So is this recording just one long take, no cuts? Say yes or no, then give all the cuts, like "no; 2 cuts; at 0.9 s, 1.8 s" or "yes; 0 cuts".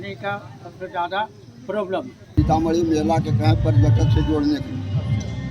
no; 1 cut; at 2.3 s